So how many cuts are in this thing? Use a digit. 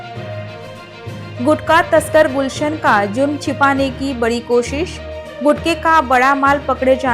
1